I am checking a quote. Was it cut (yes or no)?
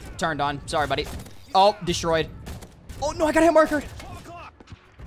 no